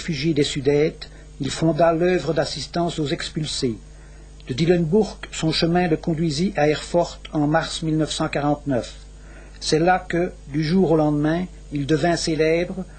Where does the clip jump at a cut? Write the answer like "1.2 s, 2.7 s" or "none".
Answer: none